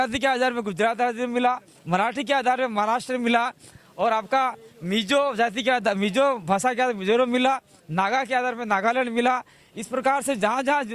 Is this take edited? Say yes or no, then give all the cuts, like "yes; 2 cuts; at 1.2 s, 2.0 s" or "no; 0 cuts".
no; 0 cuts